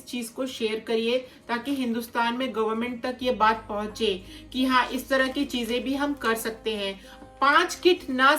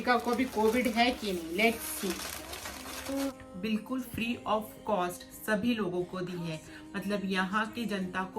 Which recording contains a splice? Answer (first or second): second